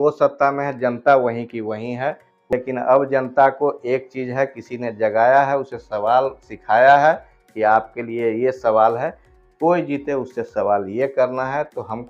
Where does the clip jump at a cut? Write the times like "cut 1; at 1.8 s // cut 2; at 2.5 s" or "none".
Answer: cut 1; at 2.3 s